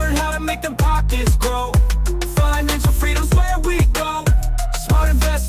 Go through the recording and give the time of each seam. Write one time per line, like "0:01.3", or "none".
none